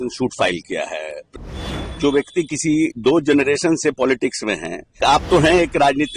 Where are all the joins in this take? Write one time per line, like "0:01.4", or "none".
0:01.3
0:05.0